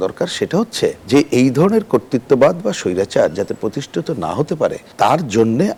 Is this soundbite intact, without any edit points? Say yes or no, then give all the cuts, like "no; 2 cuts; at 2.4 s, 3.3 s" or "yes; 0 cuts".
yes; 0 cuts